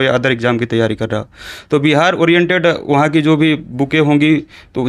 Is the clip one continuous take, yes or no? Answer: yes